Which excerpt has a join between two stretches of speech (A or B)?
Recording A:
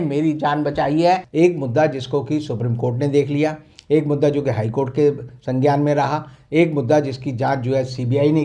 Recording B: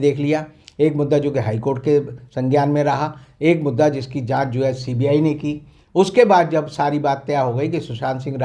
A